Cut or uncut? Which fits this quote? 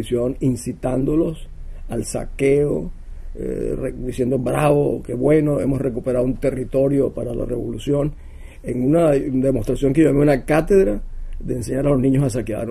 uncut